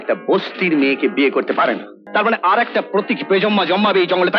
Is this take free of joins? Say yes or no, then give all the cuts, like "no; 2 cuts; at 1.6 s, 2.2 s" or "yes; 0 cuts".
no; 1 cut; at 1.9 s